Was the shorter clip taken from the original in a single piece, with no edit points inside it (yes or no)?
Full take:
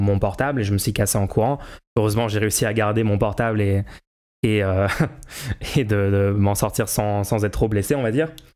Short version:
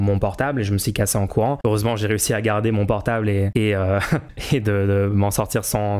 no